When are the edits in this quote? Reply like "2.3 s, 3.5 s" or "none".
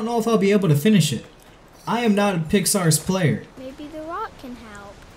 3.5 s